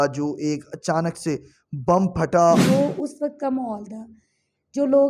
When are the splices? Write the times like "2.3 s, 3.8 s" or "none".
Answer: 2.6 s